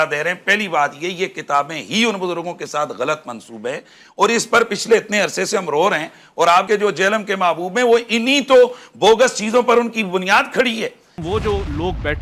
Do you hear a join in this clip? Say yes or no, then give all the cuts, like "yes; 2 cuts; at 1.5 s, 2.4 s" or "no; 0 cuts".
yes; 1 cut; at 11.1 s